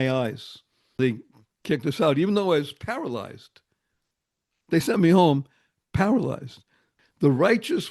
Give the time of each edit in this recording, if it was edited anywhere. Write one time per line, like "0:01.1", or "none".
0:01.0
0:07.0